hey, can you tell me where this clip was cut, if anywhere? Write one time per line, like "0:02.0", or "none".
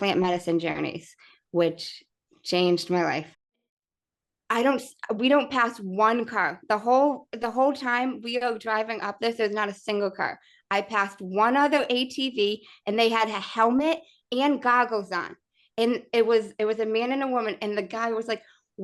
0:03.5

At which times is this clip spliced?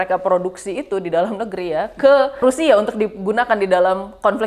0:02.4

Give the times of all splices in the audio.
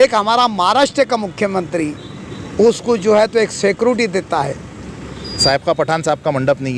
0:05.4

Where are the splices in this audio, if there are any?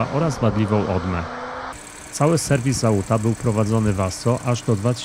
0:01.8

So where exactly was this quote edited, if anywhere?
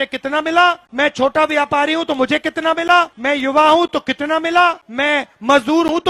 0:00.9
0:03.2
0:04.9

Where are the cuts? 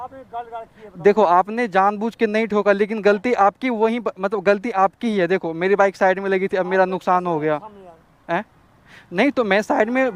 none

